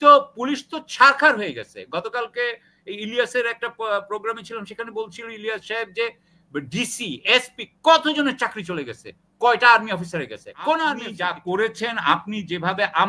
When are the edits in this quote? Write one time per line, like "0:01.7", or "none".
0:11.1